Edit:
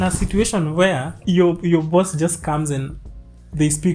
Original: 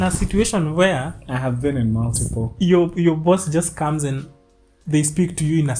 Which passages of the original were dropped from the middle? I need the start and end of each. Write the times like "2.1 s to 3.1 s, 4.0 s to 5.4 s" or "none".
1.1 s to 2.5 s